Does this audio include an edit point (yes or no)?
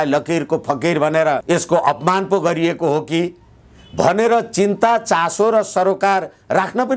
no